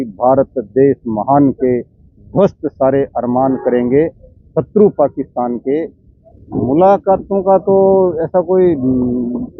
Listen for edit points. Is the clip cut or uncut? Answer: cut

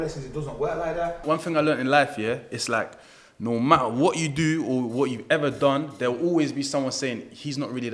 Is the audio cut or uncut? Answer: cut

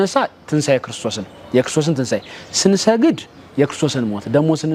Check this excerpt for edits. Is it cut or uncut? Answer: uncut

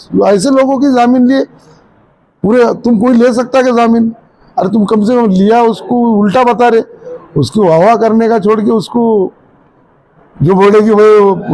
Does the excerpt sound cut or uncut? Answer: uncut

